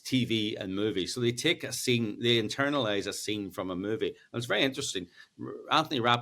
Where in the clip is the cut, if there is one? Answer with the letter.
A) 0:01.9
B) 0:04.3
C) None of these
C